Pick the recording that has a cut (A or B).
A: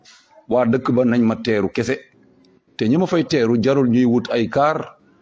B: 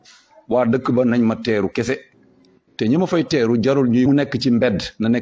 B